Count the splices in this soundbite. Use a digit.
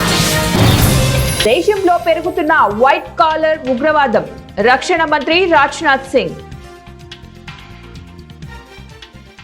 1